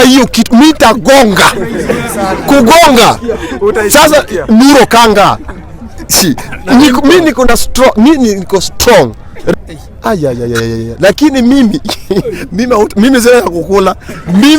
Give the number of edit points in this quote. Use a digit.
1